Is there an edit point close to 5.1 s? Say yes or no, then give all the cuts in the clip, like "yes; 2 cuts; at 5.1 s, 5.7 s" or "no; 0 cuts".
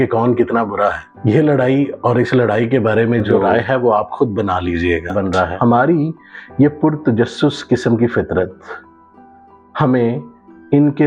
yes; 1 cut; at 5.1 s